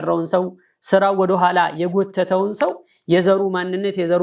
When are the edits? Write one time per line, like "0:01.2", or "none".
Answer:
none